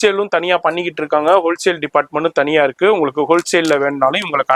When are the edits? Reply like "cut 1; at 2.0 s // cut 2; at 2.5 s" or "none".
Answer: none

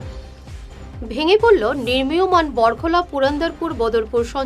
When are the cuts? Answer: cut 1; at 0.9 s

